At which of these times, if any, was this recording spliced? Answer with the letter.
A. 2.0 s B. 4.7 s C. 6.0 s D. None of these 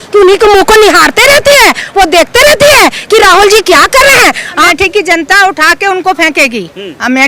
B